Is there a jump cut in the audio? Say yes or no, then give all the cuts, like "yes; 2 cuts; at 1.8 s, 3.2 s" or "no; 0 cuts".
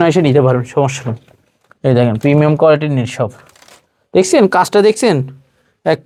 no; 0 cuts